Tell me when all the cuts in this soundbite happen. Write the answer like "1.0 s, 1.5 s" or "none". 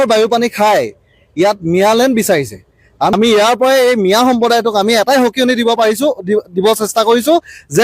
3.1 s